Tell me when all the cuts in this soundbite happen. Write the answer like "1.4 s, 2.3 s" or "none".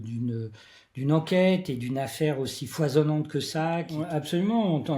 3.9 s